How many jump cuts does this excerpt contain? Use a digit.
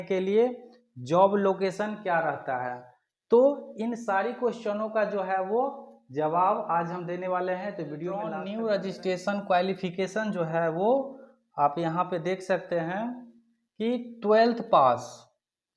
1